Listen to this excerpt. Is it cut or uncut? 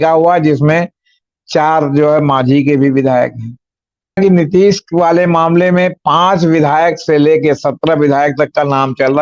cut